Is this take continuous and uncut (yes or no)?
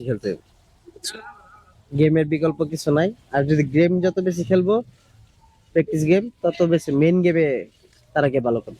yes